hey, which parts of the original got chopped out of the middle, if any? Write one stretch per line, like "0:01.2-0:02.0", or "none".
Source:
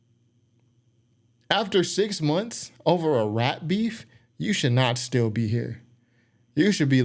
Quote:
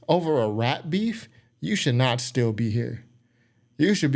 none